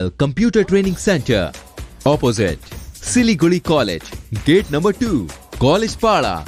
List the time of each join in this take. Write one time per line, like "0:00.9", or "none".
none